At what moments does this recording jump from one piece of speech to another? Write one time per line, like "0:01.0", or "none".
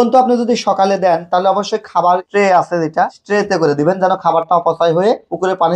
0:02.3
0:03.2